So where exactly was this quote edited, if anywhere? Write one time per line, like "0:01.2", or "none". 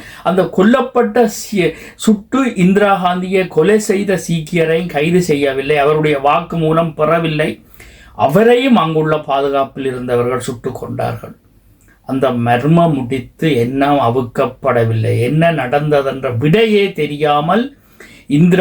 none